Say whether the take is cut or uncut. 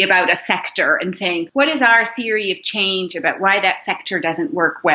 cut